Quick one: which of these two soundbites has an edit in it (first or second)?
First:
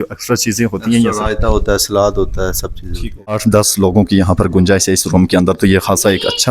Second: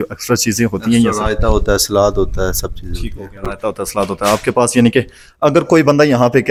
first